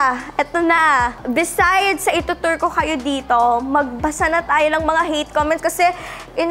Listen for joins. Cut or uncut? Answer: uncut